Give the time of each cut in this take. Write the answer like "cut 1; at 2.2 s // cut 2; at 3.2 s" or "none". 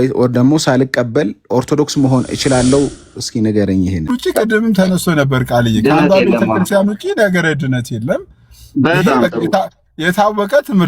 cut 1; at 4.1 s